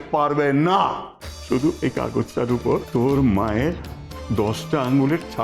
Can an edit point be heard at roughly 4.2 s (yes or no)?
no